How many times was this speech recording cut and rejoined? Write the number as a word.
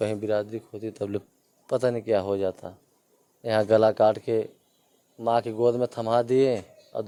zero